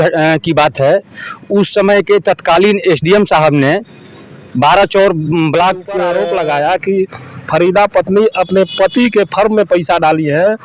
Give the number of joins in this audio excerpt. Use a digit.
1